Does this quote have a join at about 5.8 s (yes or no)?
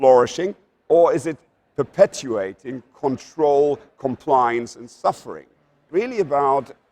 yes